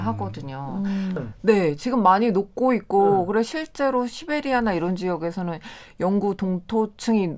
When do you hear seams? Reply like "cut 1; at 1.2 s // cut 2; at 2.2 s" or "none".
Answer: cut 1; at 1.1 s

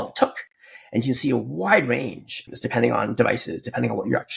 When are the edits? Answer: cut 1; at 2.4 s

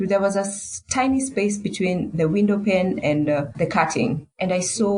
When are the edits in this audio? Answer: cut 1; at 3.5 s

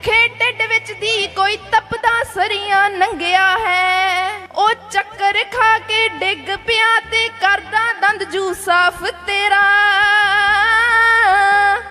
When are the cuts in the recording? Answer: cut 1; at 4.4 s

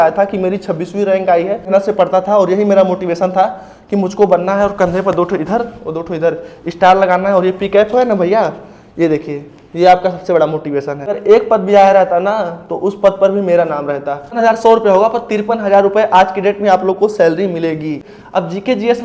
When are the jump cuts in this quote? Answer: cut 1; at 1.7 s // cut 2; at 11.1 s // cut 3; at 14.4 s // cut 4; at 18.1 s

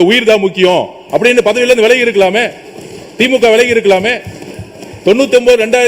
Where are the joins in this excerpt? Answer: none

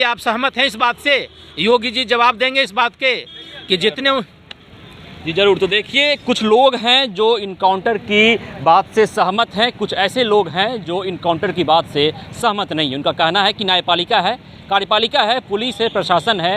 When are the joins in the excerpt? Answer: none

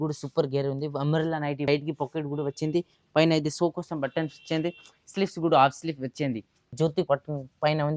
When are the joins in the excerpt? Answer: cut 1; at 1.7 s // cut 2; at 6.7 s

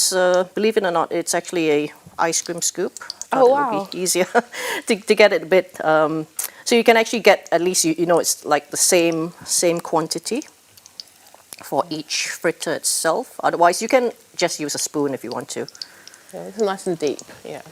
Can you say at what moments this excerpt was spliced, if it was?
none

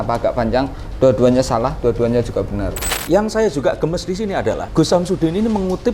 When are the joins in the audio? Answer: cut 1; at 2.9 s // cut 2; at 4.7 s

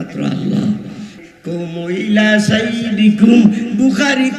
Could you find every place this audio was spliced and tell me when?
cut 1; at 1.1 s

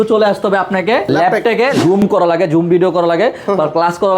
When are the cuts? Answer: cut 1; at 2.0 s

